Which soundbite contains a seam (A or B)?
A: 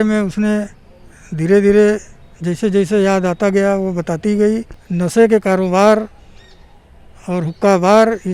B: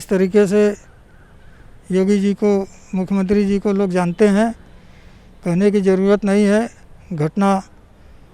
A